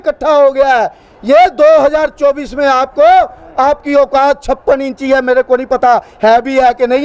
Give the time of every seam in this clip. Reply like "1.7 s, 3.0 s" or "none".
none